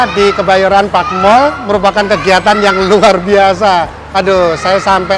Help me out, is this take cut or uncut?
uncut